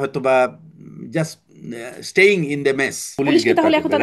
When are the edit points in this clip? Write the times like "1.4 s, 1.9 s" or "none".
3.1 s

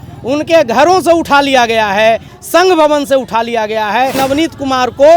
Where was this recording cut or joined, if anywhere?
2.3 s, 4.1 s

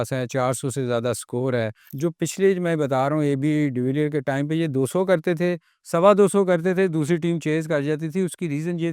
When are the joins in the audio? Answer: 1.8 s

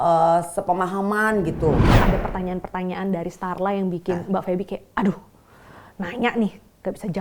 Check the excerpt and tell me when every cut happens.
2.0 s

